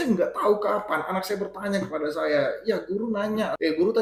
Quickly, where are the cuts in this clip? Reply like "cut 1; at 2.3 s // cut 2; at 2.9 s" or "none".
none